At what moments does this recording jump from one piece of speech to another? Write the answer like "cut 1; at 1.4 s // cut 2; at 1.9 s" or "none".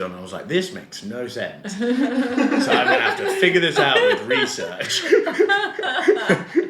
none

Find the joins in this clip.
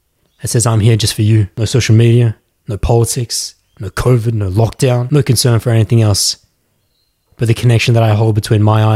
cut 1; at 1.5 s // cut 2; at 5.1 s

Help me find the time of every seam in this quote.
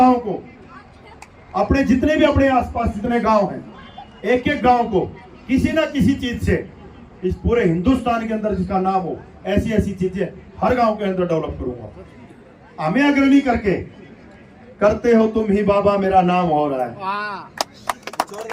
cut 1; at 12.2 s

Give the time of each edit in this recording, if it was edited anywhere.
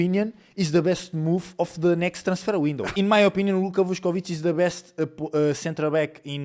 cut 1; at 2.9 s

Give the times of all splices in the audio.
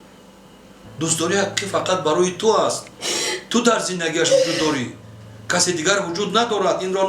none

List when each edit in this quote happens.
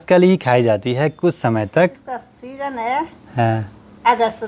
none

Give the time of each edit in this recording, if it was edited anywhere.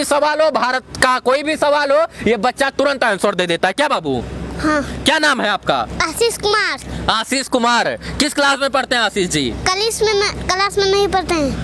none

